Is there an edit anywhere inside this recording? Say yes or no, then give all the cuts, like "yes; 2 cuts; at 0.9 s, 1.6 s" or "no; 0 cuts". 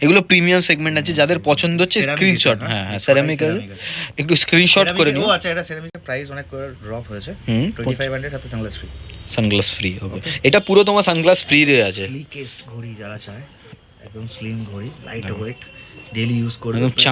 no; 0 cuts